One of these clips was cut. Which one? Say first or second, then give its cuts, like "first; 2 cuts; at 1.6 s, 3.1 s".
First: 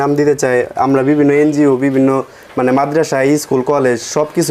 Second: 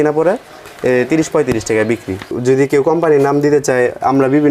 second; 1 cut; at 2.3 s